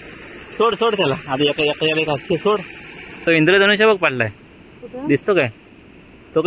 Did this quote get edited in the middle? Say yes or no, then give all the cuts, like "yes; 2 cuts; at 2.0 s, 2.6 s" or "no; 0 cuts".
yes; 1 cut; at 3.0 s